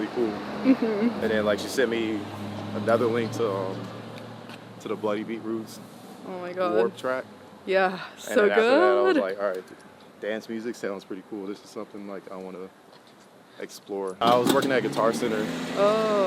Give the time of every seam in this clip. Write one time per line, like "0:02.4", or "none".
0:14.2